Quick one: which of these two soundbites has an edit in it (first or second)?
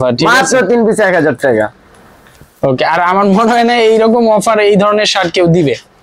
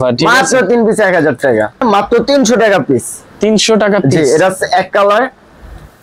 second